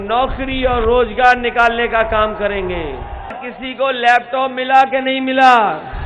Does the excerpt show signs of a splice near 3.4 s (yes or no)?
yes